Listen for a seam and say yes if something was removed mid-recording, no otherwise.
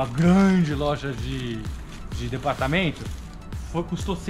no